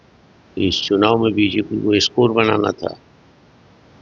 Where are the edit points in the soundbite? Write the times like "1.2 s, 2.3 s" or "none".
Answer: none